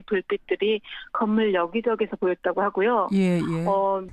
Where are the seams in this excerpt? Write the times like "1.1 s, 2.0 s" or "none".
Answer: 2.0 s